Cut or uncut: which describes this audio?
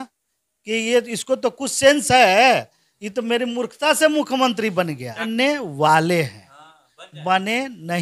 cut